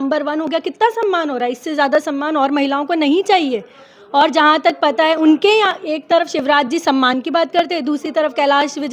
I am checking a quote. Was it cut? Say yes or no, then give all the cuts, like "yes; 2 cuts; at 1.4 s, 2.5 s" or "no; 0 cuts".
no; 0 cuts